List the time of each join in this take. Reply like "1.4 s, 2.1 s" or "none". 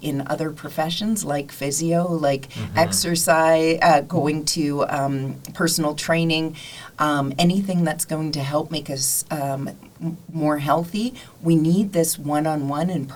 none